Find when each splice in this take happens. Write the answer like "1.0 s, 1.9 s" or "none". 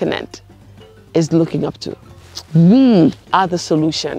none